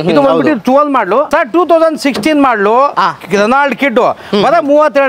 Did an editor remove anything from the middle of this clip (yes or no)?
yes